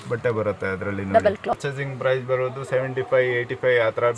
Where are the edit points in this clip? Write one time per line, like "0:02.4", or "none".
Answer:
0:01.6